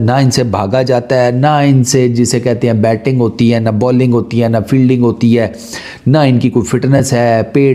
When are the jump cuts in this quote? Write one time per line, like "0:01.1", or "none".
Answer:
none